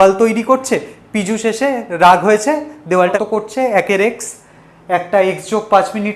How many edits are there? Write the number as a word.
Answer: one